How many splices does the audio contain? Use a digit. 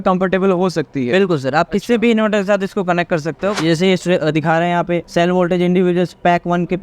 1